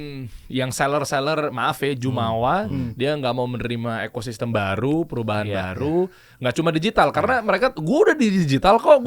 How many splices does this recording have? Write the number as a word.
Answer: zero